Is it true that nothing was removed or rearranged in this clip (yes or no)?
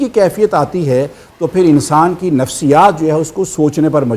yes